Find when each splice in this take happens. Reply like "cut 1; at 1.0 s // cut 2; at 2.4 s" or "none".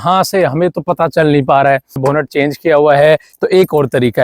cut 1; at 2.0 s // cut 2; at 3.3 s